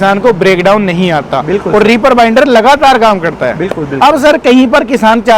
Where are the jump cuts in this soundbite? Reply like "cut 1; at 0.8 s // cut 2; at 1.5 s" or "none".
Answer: none